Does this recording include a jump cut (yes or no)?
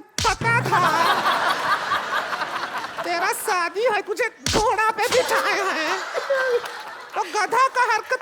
no